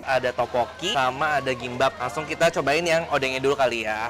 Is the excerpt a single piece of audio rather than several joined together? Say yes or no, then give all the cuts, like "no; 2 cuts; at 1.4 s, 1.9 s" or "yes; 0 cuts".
no; 2 cuts; at 0.9 s, 2.0 s